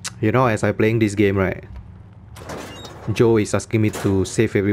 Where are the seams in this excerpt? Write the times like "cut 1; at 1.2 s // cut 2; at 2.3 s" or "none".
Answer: none